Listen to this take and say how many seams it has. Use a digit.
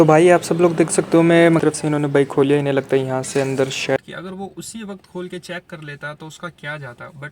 2